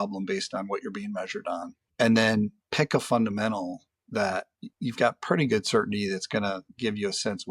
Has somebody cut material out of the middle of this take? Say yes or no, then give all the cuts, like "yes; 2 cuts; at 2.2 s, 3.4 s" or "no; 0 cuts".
yes; 3 cuts; at 1.8 s, 2.6 s, 4.6 s